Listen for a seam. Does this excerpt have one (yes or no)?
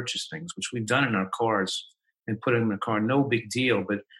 no